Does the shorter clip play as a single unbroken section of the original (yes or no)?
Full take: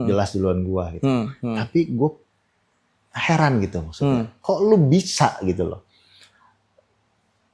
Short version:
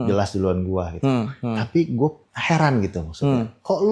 no